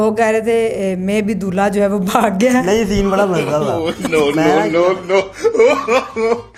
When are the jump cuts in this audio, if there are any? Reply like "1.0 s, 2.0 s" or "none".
none